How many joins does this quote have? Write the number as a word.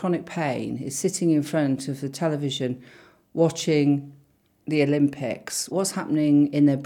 one